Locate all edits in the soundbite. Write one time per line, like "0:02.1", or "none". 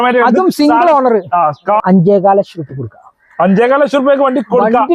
0:01.8